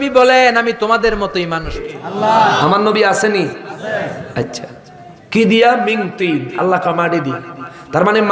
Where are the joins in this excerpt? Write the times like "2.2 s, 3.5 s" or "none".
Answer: 1.8 s